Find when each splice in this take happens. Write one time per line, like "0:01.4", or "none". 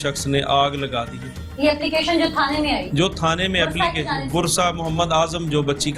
none

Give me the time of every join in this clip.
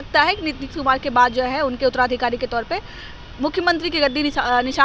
none

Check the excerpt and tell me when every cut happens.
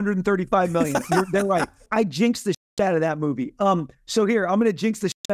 0:01.9

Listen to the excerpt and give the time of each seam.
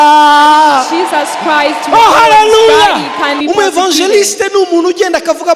0:03.4

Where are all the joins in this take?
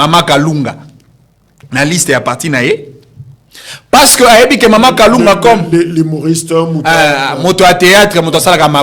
none

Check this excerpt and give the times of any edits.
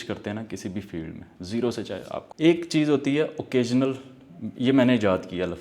0:02.2

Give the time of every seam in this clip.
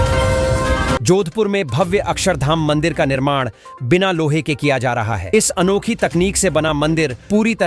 0:01.0

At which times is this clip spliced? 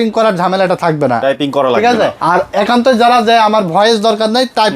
0:02.2

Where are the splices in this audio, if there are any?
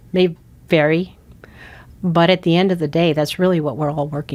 none

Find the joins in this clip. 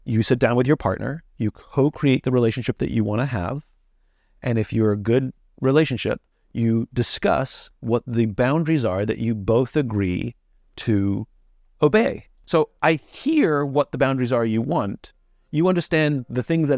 0:12.4

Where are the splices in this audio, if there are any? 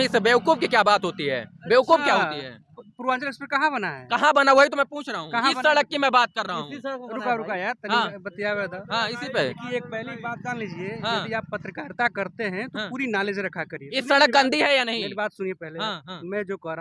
none

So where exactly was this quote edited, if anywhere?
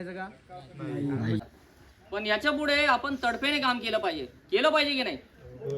0:01.5

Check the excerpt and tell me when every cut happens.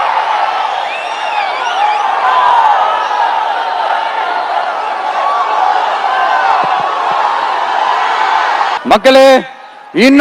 0:08.8

